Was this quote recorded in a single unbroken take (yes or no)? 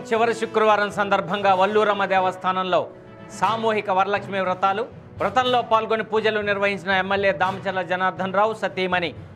yes